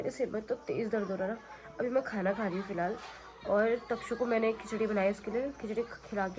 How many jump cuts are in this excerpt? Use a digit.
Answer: 0